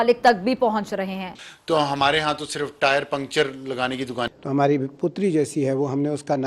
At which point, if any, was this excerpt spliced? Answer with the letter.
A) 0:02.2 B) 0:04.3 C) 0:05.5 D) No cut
B